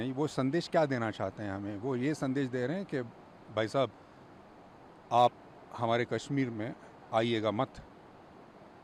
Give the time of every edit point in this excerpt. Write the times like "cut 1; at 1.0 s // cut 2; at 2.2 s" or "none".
none